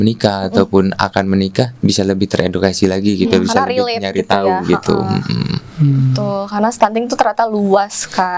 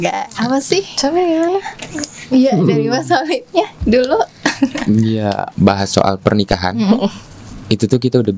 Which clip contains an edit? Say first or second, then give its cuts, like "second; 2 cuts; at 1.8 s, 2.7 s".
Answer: second; 1 cut; at 5.5 s